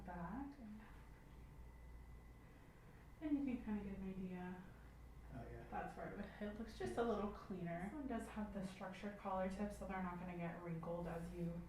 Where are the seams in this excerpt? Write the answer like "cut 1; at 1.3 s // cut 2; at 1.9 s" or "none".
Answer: cut 1; at 0.7 s // cut 2; at 7.9 s